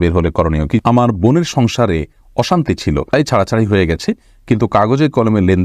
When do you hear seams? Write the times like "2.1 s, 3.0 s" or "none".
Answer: 0.8 s, 3.1 s